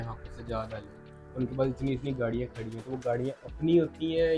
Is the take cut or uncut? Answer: uncut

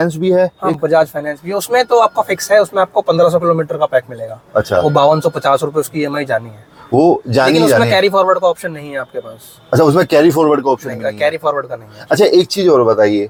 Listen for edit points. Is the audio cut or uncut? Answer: uncut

